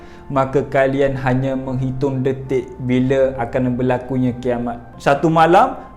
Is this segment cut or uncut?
cut